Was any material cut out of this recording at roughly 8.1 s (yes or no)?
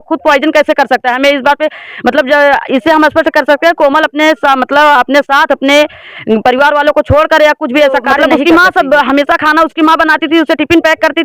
yes